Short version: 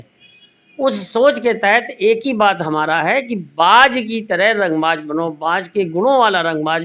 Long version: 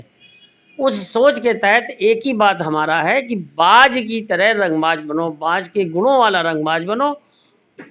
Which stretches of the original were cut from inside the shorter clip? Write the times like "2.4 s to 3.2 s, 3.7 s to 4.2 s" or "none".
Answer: none